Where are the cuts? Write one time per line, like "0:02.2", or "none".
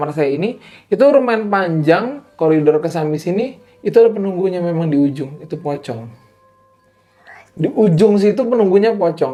none